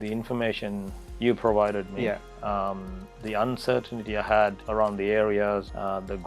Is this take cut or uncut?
uncut